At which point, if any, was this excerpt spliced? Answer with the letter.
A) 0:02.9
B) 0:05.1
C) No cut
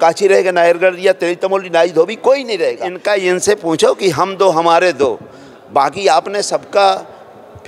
A